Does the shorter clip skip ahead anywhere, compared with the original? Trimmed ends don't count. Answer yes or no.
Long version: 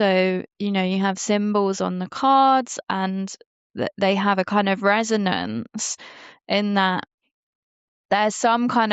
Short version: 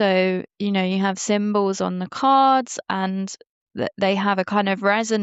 no